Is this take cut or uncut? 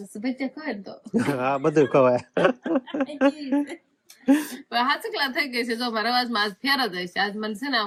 uncut